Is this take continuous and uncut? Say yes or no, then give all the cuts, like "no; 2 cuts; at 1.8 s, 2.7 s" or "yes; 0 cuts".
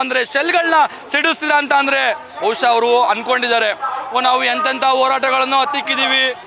yes; 0 cuts